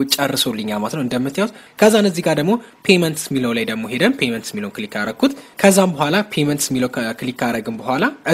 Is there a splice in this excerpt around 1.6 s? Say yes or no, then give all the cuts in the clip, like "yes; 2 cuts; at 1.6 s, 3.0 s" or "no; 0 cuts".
yes; 1 cut; at 1.6 s